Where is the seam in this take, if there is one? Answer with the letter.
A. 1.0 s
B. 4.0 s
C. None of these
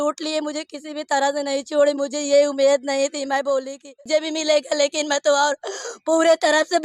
B